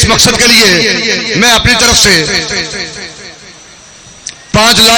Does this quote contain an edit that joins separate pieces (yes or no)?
no